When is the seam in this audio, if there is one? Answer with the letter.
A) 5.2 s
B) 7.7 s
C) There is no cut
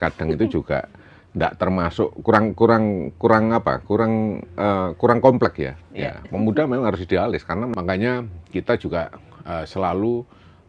B